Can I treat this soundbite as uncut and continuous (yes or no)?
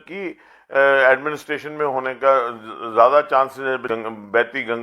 no